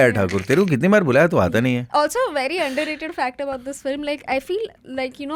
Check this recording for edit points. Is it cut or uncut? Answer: uncut